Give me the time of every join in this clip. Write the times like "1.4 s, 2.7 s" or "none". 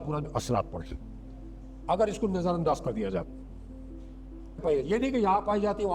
4.6 s